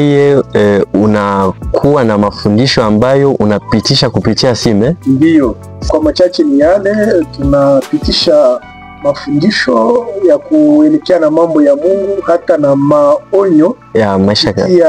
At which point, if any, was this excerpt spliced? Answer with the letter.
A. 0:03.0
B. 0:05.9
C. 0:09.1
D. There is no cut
B